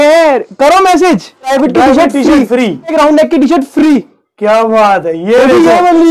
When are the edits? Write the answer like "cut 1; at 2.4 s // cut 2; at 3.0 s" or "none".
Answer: cut 1; at 1.5 s // cut 2; at 2.9 s